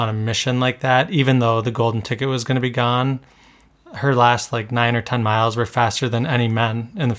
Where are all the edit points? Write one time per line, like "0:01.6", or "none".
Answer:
none